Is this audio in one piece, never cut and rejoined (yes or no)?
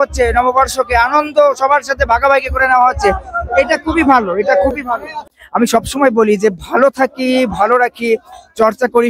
no